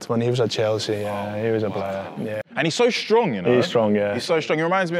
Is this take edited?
yes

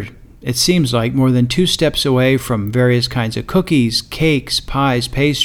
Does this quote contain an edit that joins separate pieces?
no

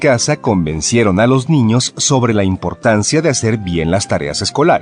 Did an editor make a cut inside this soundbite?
no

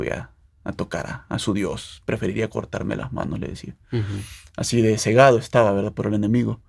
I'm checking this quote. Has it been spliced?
no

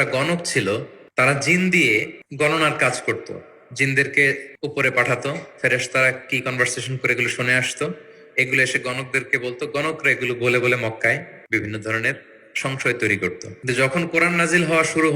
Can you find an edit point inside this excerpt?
yes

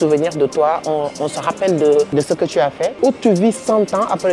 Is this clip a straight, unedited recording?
no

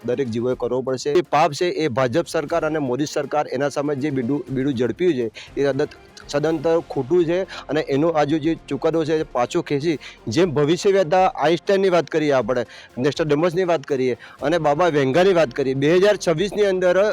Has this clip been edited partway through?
yes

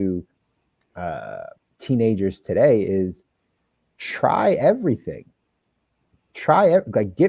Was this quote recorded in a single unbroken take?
yes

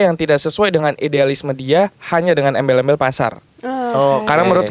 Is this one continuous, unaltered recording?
yes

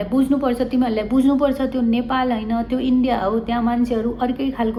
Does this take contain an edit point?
no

